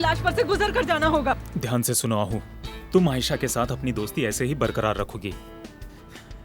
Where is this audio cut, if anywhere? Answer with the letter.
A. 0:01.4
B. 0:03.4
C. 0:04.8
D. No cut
A